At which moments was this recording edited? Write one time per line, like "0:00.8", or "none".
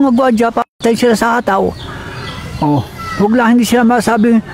none